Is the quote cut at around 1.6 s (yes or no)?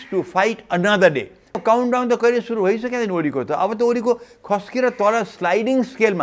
yes